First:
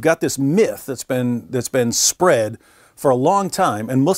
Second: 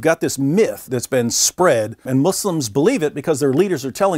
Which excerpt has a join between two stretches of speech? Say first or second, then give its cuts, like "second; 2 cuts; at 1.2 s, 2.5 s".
second; 2 cuts; at 0.8 s, 2.0 s